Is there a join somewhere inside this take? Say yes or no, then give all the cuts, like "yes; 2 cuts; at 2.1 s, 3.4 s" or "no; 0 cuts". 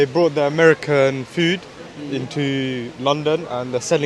no; 0 cuts